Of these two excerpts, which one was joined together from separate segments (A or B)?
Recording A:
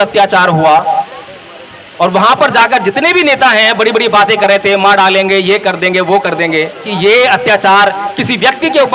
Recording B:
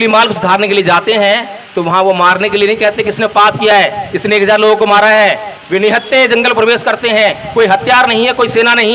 A